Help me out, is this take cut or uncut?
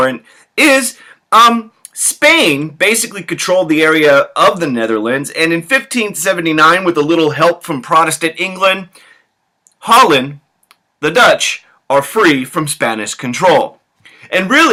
uncut